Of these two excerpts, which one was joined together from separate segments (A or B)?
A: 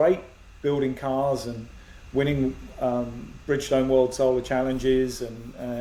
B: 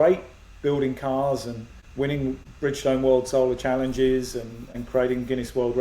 B